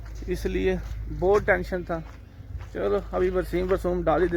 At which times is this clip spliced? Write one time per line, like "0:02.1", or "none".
none